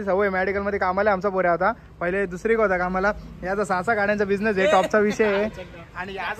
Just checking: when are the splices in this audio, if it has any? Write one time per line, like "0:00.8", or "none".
none